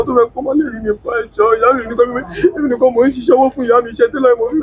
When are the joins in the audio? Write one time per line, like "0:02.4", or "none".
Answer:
none